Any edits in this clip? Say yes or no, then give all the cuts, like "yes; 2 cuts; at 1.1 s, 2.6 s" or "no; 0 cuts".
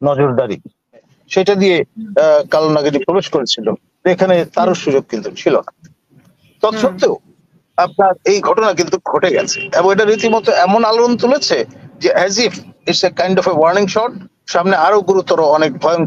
yes; 1 cut; at 1.2 s